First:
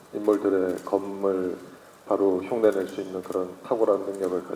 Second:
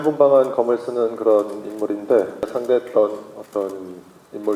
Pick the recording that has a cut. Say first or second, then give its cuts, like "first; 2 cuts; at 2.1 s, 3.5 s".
second; 1 cut; at 2.5 s